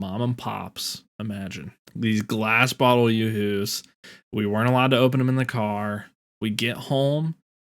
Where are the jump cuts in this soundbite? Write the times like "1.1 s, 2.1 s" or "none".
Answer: 1.8 s

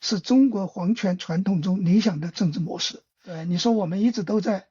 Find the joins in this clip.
3.4 s

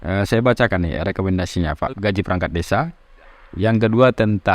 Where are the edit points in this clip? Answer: 2.0 s

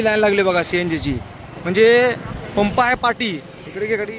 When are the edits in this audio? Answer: none

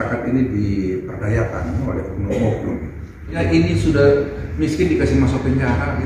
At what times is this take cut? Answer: 3.4 s

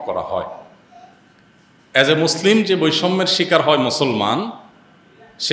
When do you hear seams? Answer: none

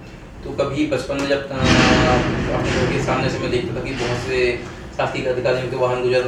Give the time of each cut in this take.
none

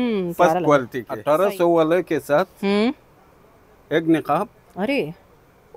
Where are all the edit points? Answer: 1.0 s

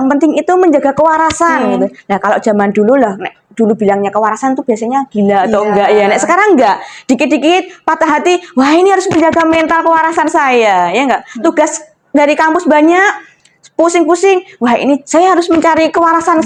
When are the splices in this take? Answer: none

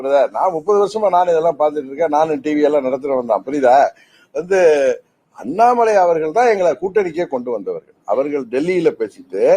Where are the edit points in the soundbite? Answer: none

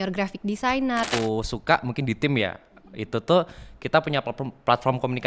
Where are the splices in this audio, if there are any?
1.1 s

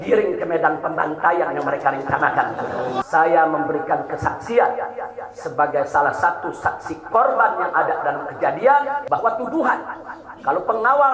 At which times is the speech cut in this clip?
3.0 s, 9.0 s

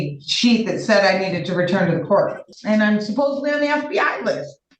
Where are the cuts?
2.5 s

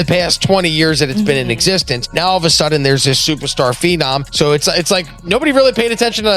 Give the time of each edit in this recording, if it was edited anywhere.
2.0 s, 4.3 s

